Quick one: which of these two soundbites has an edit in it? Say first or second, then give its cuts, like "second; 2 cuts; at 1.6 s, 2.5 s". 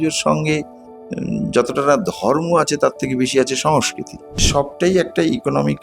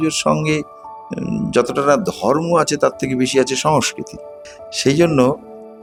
first; 1 cut; at 4.4 s